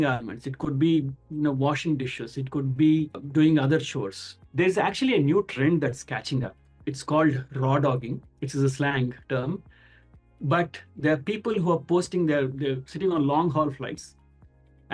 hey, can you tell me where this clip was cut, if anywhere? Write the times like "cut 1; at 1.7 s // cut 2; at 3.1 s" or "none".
none